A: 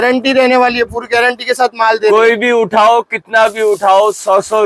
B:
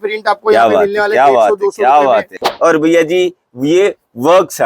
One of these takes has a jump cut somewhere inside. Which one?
B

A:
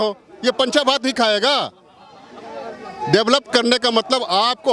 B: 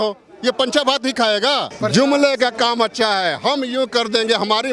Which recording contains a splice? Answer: B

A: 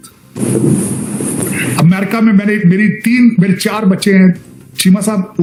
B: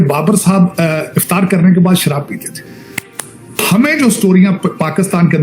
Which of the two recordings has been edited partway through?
B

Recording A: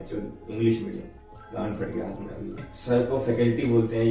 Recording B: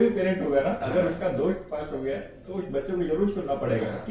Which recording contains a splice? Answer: A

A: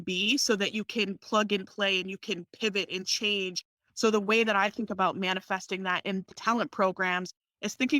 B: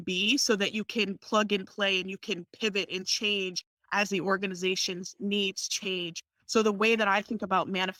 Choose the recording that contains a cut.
A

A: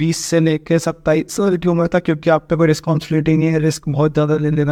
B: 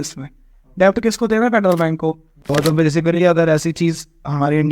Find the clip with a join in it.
B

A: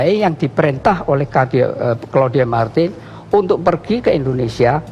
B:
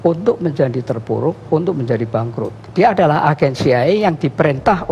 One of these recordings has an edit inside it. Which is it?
B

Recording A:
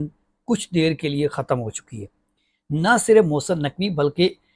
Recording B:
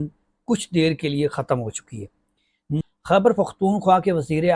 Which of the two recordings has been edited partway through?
B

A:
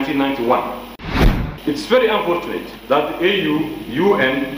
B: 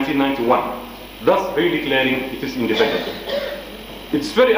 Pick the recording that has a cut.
A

